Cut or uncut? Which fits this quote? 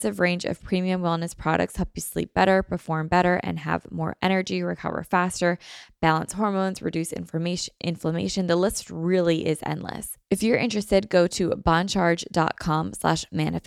cut